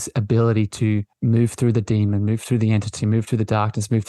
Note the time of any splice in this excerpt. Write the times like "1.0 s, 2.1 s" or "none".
1.1 s